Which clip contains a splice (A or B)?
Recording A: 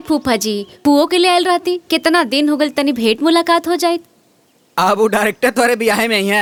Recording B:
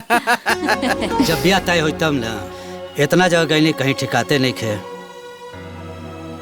B